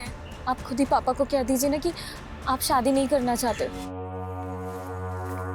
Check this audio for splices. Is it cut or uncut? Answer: cut